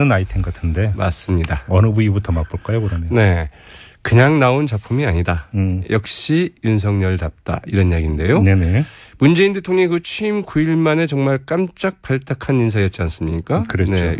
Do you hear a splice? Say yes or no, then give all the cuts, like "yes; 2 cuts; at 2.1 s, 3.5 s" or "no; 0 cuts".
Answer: yes; 1 cut; at 1.9 s